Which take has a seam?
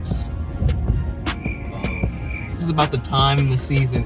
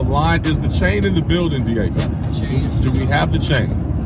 first; 1 cut; at 2.6 s

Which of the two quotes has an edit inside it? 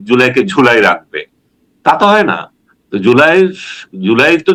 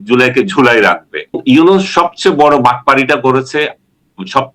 second; 1 cut; at 1.4 s

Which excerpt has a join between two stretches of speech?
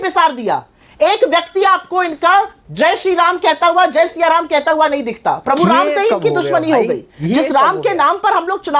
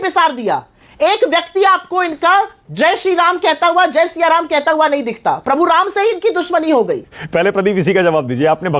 second; 1 cut; at 7.1 s

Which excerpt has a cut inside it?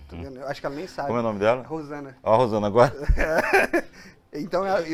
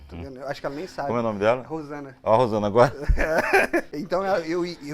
second; 1 cut; at 3.9 s

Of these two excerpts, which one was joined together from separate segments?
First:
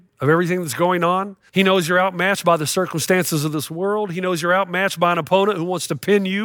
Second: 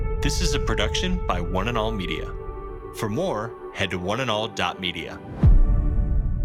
first; 1 cut; at 1.4 s

